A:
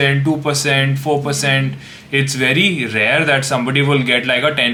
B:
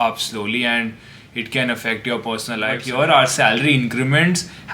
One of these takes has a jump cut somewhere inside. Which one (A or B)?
B